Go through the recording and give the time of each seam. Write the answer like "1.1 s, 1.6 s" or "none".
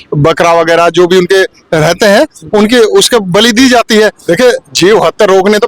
4.2 s